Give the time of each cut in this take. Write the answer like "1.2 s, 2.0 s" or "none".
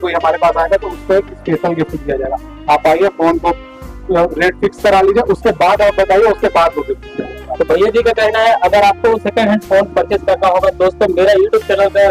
none